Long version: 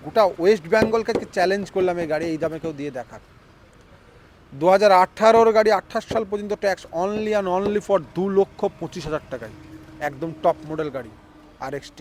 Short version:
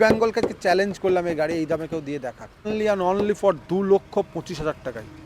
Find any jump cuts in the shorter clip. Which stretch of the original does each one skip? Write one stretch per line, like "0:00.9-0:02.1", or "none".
0:03.4-0:07.1